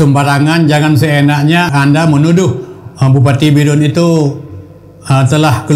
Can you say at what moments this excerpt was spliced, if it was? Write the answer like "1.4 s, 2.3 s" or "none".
1.7 s